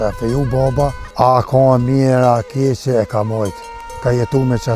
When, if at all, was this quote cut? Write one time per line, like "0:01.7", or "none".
0:01.0